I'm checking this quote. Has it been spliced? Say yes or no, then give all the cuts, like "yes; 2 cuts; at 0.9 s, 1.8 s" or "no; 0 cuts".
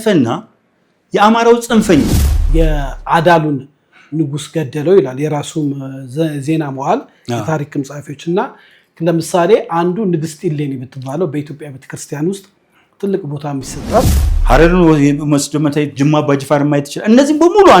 yes; 2 cuts; at 2.4 s, 14.1 s